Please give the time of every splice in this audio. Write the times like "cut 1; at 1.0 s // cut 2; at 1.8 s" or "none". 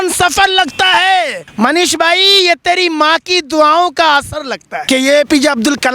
cut 1; at 1.4 s // cut 2; at 4.8 s